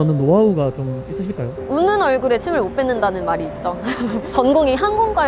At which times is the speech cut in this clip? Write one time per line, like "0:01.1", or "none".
none